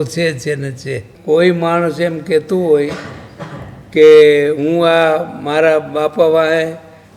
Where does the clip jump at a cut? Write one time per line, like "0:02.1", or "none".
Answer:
0:01.1

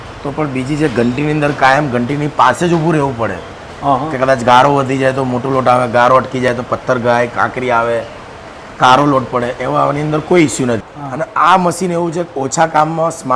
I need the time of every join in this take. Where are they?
0:10.8

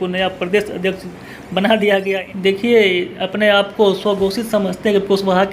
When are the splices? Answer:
0:02.3

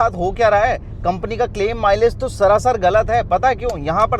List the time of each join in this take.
none

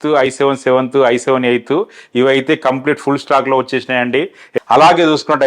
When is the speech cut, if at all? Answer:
0:04.6

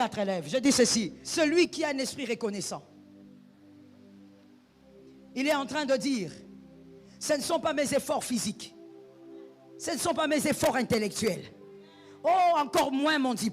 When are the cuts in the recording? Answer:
0:01.2

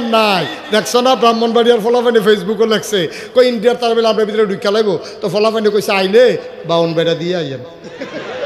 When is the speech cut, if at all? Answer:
none

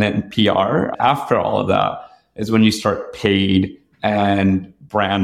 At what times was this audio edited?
0:00.9

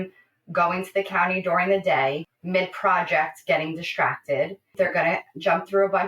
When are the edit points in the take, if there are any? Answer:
0:02.3
0:04.7

